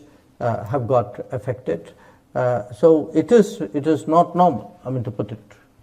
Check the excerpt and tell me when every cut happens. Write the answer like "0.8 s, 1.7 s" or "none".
none